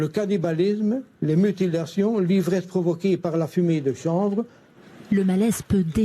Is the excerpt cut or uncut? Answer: cut